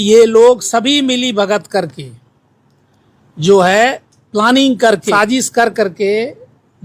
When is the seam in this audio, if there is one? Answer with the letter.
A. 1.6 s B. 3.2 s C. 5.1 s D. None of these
C